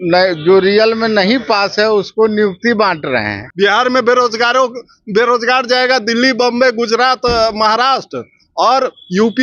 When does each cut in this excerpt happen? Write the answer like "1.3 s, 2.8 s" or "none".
3.4 s